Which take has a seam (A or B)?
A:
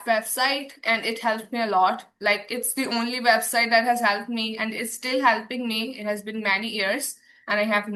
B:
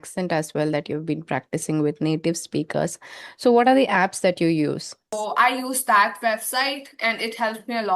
B